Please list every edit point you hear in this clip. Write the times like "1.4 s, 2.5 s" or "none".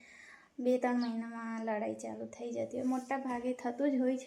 none

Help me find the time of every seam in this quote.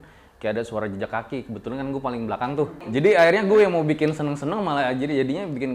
2.8 s

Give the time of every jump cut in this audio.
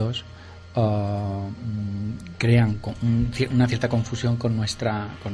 3.9 s

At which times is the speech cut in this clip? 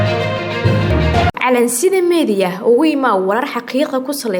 1.3 s

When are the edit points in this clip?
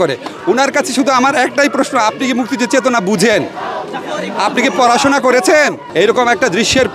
5.8 s

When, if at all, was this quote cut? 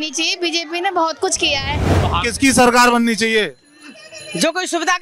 1.9 s

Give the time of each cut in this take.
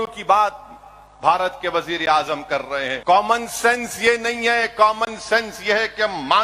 3.0 s

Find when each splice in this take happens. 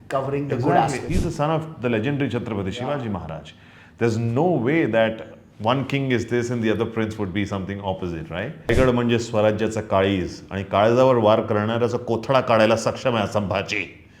1.0 s, 8.7 s

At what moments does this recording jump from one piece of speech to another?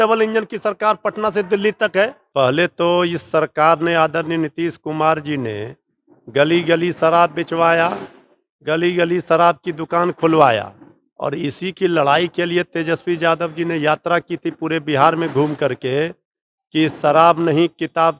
2.2 s

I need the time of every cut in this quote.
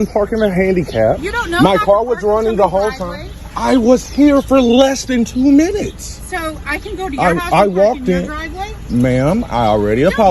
7.4 s

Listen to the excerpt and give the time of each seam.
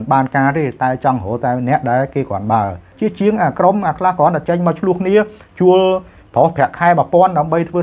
2.8 s

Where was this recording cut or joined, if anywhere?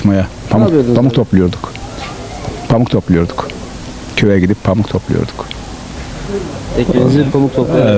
none

